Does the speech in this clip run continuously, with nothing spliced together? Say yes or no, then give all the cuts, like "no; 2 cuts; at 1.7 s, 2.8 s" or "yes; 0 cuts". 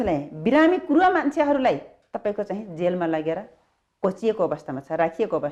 yes; 0 cuts